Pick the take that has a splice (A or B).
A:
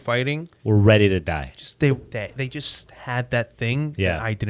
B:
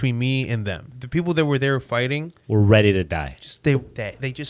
B